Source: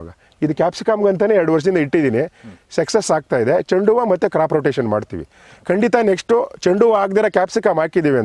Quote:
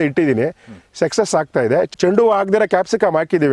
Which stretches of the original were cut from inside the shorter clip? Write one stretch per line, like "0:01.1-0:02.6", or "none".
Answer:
0:03.7-0:06.5

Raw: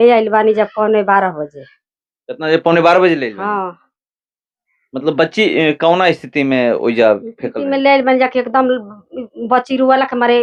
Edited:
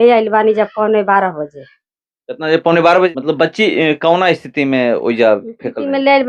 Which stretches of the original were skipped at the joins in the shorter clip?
0:03.1-0:04.9

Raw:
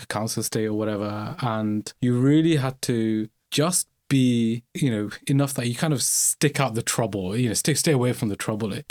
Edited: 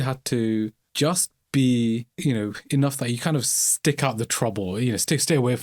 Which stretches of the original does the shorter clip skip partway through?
none

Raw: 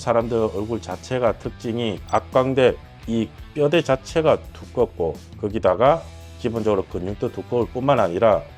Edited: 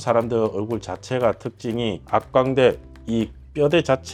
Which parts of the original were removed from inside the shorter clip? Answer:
none

